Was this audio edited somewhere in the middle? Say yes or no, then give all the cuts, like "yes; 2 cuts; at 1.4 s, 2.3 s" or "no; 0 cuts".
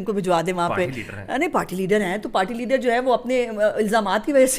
no; 0 cuts